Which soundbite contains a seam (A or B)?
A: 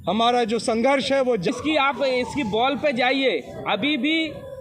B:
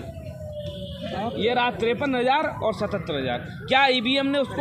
A